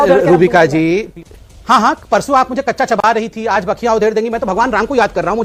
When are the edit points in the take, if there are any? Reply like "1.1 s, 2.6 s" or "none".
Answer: none